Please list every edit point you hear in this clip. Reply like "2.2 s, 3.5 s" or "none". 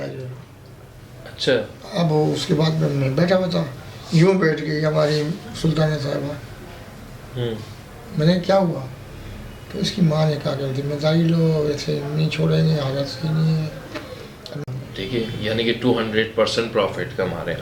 14.6 s